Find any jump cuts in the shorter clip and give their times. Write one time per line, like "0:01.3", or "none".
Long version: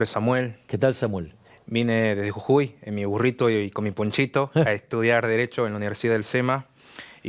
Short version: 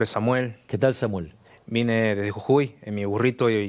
none